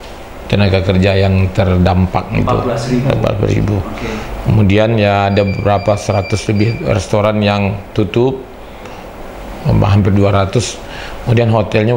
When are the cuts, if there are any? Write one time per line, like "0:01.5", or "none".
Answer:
none